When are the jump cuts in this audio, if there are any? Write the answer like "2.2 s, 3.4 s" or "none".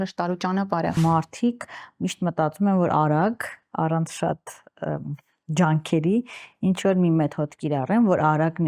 1.0 s